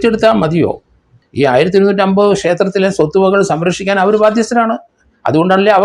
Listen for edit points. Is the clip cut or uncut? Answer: cut